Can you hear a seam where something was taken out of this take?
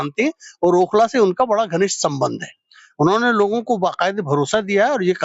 no; 0 cuts

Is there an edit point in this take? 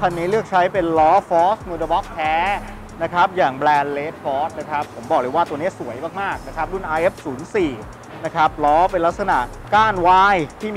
no; 0 cuts

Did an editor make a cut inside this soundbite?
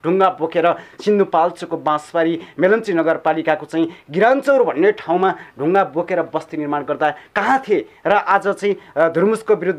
no; 0 cuts

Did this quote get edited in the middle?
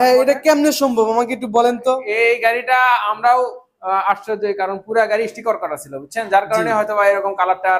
no; 0 cuts

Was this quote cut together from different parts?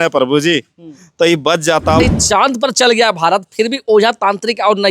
yes; 1 cut; at 2.0 s

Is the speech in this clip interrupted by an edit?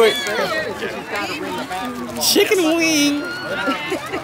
no; 0 cuts

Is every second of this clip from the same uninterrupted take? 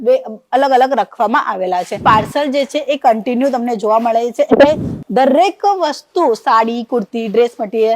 no; 1 cut; at 1.9 s

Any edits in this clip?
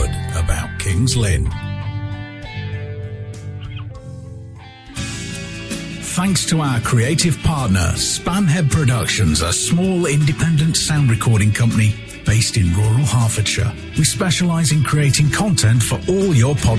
yes; 1 cut; at 5.2 s

